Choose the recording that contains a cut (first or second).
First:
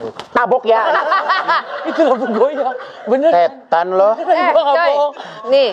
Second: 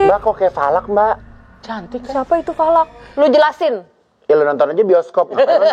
second